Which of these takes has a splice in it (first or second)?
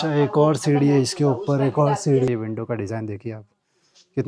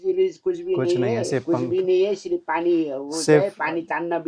first